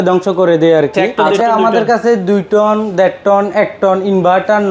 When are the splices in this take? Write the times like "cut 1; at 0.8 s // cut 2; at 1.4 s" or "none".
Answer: cut 1; at 1.2 s